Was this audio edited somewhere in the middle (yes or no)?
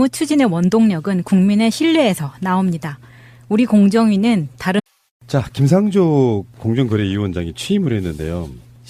no